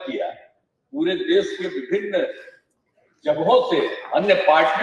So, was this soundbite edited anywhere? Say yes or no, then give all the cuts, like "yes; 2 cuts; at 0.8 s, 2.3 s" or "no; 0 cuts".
no; 0 cuts